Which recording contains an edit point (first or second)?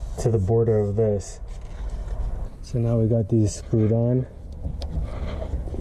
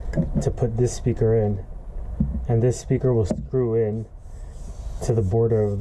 first